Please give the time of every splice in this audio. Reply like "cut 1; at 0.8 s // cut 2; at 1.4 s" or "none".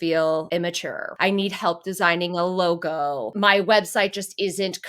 cut 1; at 1.0 s // cut 2; at 3.3 s